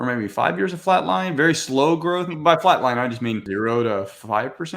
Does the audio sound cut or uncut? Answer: cut